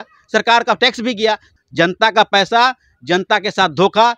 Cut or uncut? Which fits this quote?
cut